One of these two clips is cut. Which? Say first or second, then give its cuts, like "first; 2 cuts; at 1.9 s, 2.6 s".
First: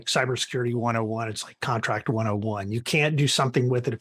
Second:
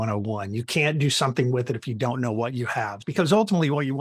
second; 1 cut; at 3.0 s